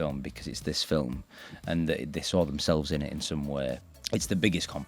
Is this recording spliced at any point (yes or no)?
yes